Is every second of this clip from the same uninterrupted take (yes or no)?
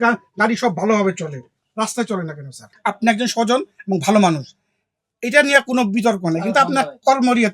no